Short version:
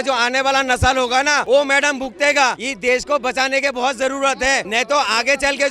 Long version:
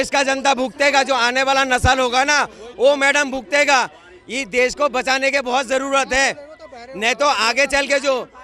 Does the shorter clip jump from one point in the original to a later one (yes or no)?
yes